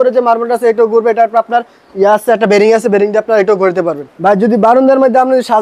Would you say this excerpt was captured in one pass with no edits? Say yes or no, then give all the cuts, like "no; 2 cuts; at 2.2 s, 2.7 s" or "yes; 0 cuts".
no; 1 cut; at 4.0 s